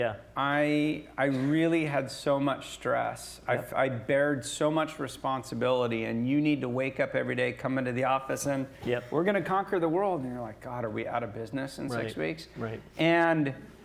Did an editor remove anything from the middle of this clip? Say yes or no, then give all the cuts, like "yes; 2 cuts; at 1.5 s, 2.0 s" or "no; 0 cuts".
no; 0 cuts